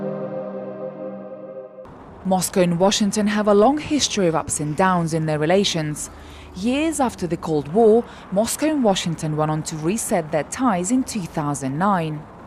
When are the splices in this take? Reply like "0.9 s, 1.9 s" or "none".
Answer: 1.5 s